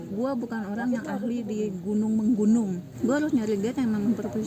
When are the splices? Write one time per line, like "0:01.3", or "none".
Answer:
0:02.8